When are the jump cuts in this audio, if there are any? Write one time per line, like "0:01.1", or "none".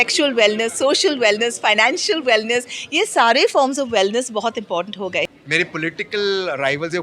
0:05.3